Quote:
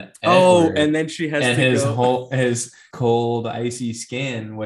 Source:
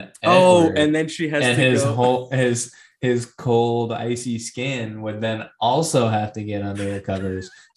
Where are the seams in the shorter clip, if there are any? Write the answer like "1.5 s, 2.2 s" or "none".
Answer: 2.9 s